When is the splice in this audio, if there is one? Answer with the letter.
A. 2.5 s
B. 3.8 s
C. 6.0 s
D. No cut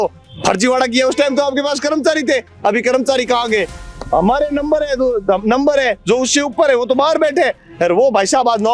B